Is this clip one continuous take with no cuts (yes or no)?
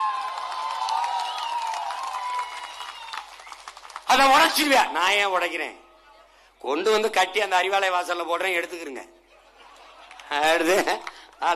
yes